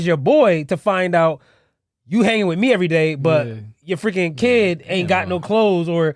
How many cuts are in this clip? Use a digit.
0